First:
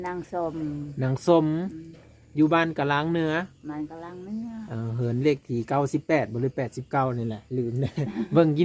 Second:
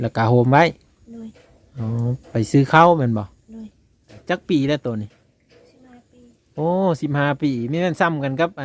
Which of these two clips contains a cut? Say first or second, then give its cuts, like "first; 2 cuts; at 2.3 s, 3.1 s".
second; 1 cut; at 4.1 s